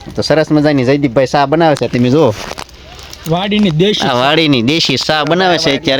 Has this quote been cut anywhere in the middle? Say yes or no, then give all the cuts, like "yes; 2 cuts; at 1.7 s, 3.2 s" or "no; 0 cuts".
no; 0 cuts